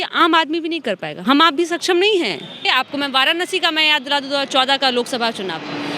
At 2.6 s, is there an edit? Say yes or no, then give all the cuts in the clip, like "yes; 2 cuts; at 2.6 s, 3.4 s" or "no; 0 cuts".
yes; 1 cut; at 2.6 s